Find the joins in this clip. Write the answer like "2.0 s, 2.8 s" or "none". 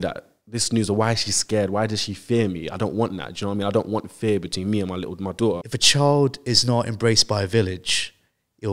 5.7 s